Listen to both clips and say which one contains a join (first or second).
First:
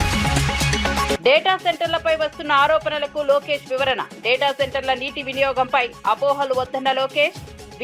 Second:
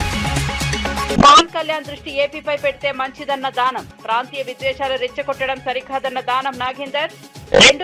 first